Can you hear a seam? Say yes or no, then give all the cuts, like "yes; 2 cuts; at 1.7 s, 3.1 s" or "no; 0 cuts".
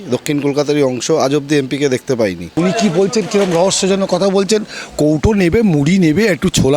yes; 1 cut; at 2.4 s